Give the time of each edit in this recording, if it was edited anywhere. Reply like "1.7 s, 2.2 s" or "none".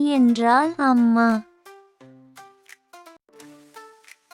1.4 s, 3.2 s